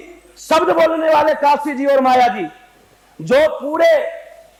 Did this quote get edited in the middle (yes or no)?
no